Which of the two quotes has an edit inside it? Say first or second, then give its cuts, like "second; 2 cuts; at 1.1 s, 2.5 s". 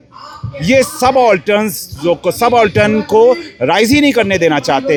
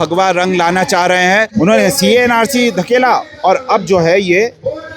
second; 1 cut; at 1.5 s